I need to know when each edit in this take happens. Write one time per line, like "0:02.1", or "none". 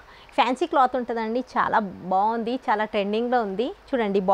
none